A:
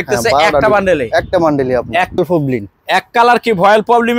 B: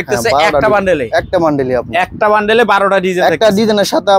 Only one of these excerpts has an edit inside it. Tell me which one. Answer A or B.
A